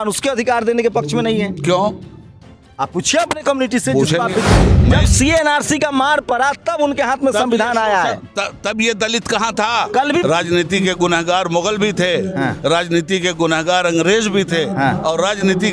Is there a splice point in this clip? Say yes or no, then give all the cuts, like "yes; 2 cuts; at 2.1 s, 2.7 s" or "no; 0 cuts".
yes; 2 cuts; at 4.7 s, 10.2 s